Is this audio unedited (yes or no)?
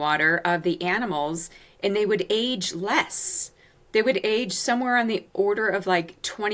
yes